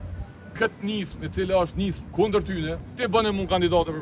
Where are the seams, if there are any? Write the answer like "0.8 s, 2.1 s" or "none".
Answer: 2.8 s